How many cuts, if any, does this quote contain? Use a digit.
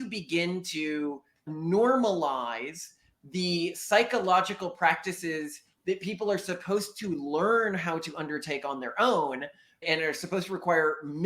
1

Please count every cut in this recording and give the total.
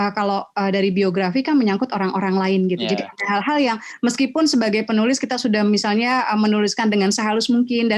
0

